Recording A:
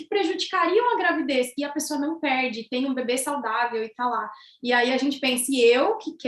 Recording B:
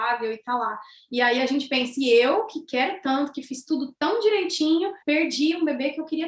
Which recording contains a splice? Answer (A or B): B